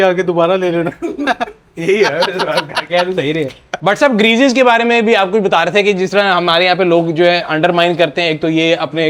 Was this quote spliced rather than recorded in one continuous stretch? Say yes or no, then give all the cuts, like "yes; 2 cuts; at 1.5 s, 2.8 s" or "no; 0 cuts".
no; 0 cuts